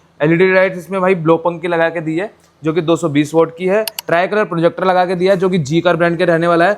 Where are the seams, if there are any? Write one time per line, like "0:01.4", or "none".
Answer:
0:04.0

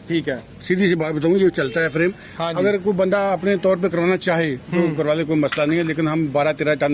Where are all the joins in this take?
none

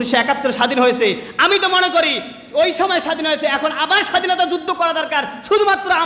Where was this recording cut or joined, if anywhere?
none

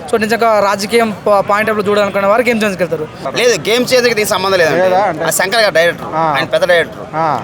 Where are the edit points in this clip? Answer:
0:03.2

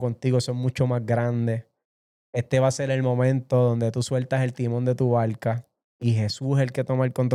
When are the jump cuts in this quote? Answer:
none

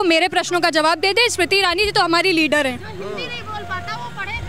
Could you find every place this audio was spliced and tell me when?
none

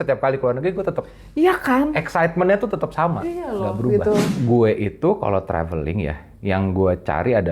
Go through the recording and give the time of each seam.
0:04.3

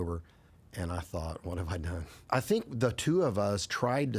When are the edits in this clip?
0:02.1

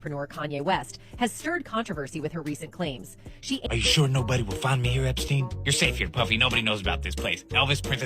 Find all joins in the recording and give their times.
0:03.6

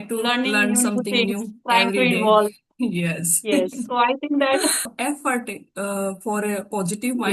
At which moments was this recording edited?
0:04.9

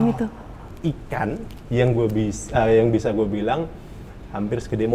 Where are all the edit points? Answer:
none

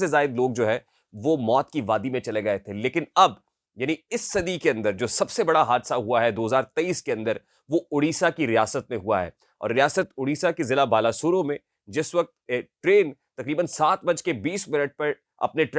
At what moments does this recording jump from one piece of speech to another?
none

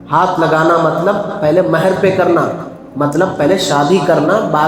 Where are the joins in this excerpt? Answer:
none

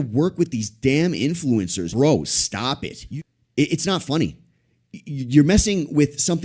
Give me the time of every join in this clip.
0:01.9
0:03.0

